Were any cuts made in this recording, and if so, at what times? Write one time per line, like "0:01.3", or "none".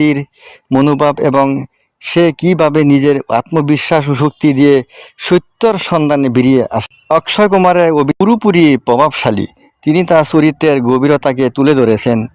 0:06.9
0:08.1